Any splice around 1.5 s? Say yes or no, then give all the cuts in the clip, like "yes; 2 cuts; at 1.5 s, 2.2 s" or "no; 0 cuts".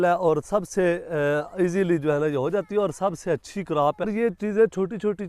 no; 1 cut; at 4.0 s